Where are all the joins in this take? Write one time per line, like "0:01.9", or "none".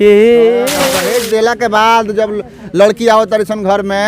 0:00.9